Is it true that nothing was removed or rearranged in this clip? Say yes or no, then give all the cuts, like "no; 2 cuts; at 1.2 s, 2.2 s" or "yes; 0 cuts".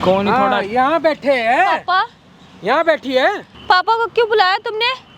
no; 1 cut; at 3.5 s